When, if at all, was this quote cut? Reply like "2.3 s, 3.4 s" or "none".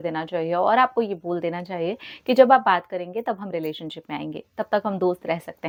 none